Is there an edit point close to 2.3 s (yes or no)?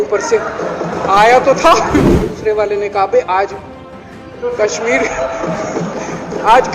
yes